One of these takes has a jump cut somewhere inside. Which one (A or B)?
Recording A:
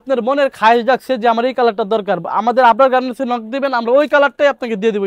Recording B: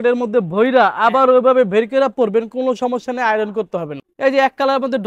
B